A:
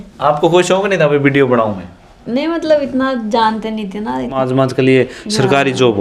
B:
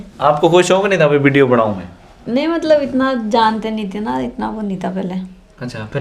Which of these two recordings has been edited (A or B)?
A